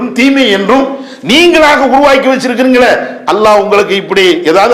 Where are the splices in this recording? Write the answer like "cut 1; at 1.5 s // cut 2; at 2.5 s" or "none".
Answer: none